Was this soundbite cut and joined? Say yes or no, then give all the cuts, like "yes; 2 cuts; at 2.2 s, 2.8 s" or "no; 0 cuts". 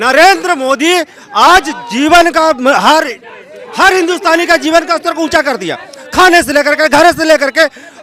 no; 0 cuts